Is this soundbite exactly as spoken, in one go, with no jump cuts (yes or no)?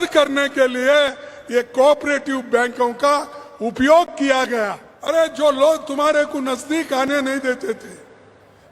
no